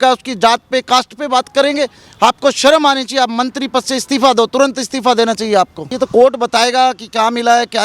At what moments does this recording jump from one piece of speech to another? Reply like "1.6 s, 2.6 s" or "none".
5.8 s

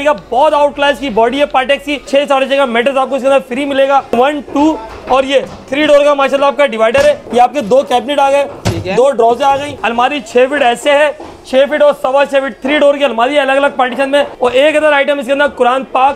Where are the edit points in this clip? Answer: 2.1 s, 4.1 s, 7.2 s, 9.8 s, 14.3 s

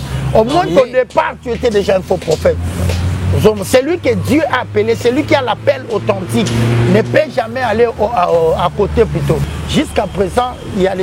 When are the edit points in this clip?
9.4 s

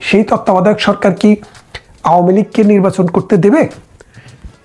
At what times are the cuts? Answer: none

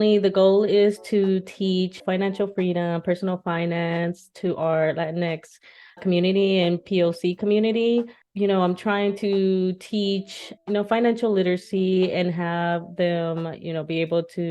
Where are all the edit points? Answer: 2.0 s, 8.2 s

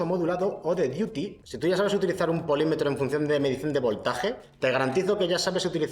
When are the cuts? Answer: 1.4 s, 4.5 s

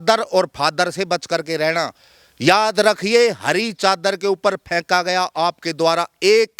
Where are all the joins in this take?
none

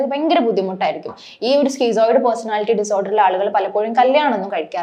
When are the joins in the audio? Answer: none

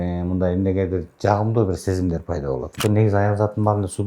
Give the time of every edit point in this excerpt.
2.7 s

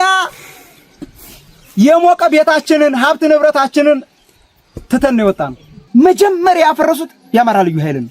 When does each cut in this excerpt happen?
5.8 s

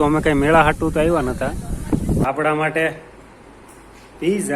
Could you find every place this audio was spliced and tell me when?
2.2 s

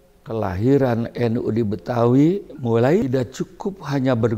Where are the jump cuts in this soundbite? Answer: 3.0 s

